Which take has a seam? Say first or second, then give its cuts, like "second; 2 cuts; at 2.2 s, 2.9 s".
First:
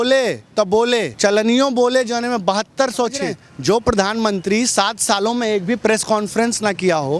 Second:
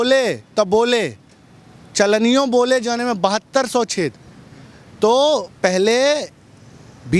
first; 2 cuts; at 1.1 s, 3.5 s